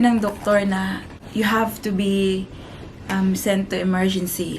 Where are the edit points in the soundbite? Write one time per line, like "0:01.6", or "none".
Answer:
0:01.1